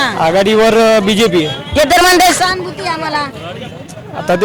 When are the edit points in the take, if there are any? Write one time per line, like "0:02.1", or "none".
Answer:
none